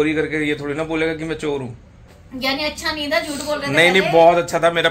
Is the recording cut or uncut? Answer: uncut